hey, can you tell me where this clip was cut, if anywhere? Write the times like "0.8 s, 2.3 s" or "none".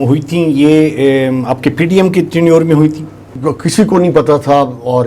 3.3 s